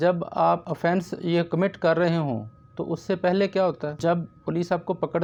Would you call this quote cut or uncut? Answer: uncut